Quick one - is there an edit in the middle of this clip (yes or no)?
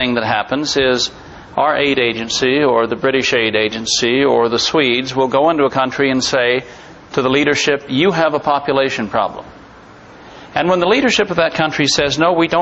no